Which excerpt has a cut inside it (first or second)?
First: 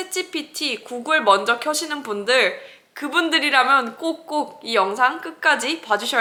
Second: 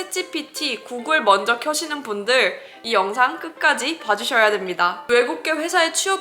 second